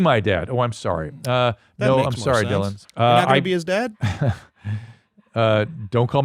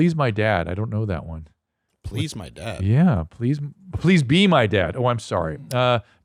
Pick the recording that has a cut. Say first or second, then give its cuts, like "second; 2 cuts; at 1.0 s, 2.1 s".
first; 2 cuts; at 2.8 s, 4.0 s